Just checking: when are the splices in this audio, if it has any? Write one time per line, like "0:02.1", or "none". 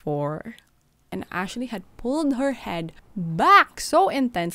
0:01.1